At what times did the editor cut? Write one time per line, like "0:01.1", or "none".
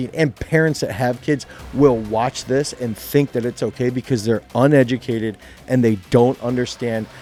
none